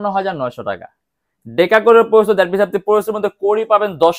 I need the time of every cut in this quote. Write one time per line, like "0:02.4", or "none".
none